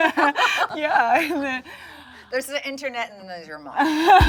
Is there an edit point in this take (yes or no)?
no